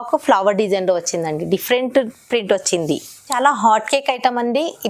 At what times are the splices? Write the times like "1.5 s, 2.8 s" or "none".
3.4 s